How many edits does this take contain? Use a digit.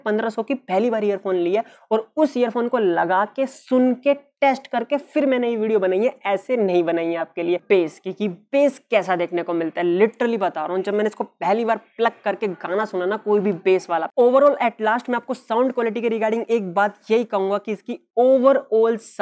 2